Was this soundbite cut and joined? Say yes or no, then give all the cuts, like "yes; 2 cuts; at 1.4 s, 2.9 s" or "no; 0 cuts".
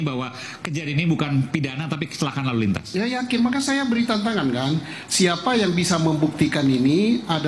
no; 0 cuts